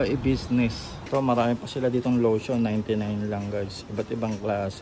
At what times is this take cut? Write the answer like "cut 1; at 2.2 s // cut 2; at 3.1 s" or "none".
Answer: cut 1; at 0.9 s